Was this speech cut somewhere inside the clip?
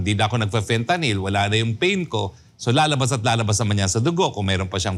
no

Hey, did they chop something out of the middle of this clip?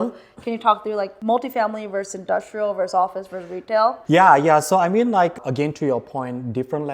yes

